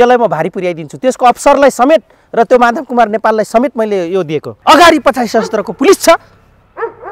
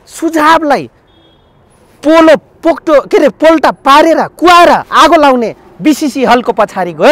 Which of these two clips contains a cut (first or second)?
first